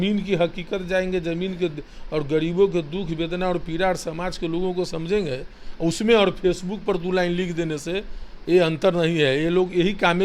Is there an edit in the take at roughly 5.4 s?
no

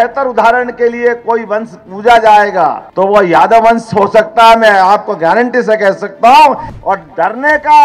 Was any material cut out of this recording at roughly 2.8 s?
yes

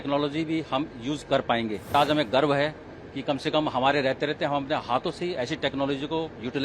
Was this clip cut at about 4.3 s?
no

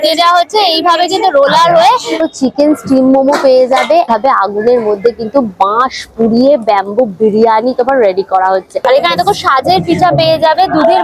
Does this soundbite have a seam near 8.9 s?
yes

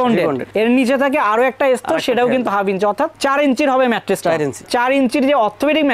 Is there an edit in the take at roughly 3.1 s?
no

